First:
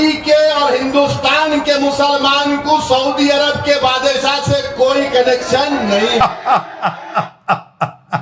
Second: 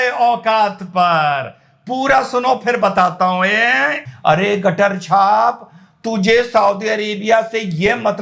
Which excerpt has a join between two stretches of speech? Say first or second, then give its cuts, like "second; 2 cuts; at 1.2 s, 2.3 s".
second; 1 cut; at 4.0 s